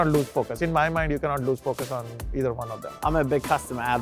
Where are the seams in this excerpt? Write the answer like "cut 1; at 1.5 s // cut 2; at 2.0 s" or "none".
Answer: cut 1; at 2.8 s